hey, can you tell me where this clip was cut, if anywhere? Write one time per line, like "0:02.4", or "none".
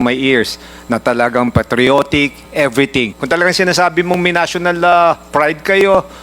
0:03.2

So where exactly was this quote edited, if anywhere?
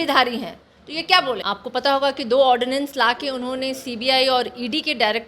0:01.4

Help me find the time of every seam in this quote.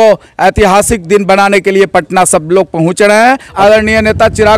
0:03.5

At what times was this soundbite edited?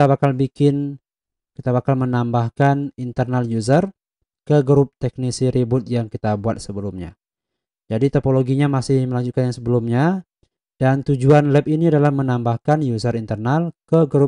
none

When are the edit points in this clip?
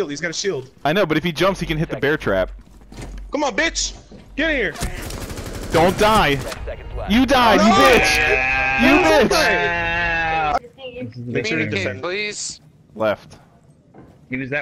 0:10.6

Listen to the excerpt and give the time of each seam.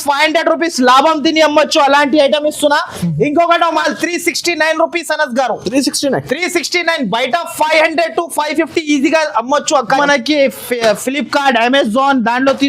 0:03.8
0:10.0

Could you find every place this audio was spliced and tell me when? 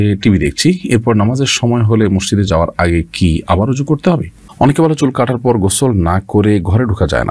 0:04.4

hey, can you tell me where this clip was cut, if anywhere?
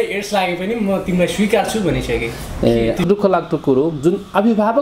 0:03.0

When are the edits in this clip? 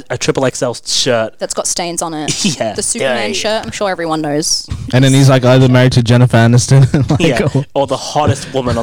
none

